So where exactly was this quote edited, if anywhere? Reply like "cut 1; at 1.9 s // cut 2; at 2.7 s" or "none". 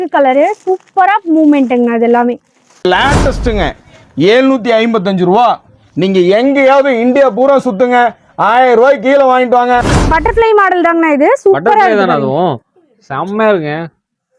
cut 1; at 2.8 s // cut 2; at 9.9 s